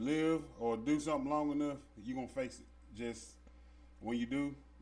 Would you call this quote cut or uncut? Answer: uncut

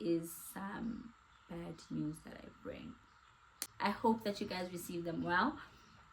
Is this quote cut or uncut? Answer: cut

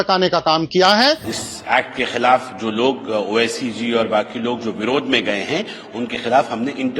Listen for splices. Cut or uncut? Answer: cut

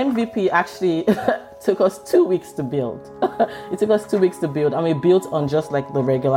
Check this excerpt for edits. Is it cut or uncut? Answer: uncut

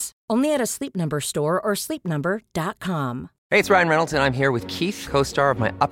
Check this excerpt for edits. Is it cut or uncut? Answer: cut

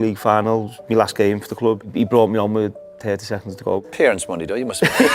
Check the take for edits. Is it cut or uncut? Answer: cut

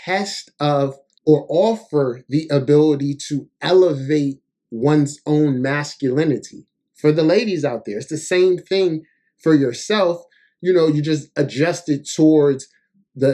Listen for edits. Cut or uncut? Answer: cut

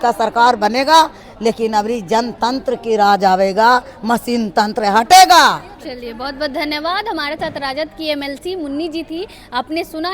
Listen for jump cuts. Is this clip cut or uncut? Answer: uncut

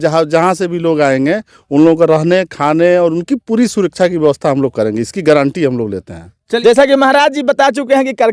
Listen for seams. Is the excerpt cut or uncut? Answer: uncut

